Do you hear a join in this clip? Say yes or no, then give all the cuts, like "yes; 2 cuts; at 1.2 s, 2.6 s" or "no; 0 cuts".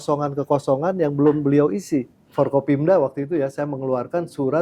yes; 1 cut; at 2.2 s